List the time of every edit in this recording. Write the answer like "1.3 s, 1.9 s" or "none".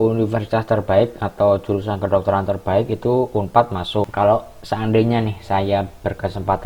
4.1 s